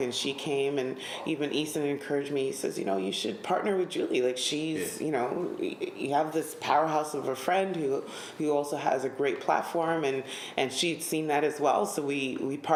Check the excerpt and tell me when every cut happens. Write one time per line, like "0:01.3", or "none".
none